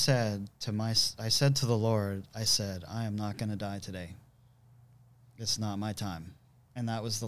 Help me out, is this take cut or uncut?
uncut